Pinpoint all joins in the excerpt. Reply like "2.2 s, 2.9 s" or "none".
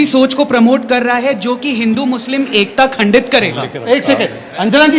none